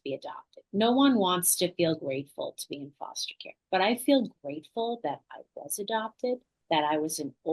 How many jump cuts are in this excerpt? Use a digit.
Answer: 1